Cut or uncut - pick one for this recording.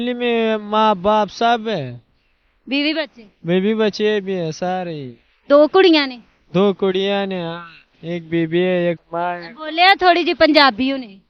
uncut